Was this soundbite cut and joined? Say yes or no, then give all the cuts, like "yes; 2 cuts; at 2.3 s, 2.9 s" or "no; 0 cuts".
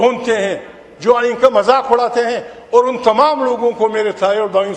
no; 0 cuts